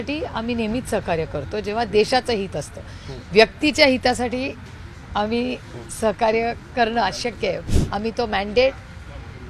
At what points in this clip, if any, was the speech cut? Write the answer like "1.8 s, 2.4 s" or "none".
7.6 s